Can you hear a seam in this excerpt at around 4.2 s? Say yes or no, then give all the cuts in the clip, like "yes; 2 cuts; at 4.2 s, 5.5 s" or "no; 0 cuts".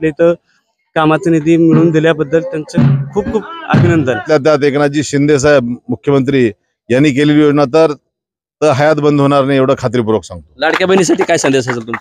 yes; 1 cut; at 4.2 s